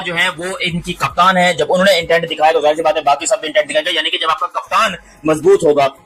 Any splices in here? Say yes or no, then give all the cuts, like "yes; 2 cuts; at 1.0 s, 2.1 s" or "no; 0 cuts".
no; 0 cuts